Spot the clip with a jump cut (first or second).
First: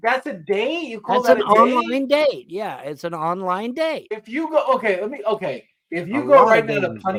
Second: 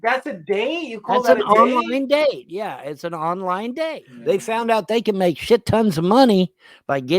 second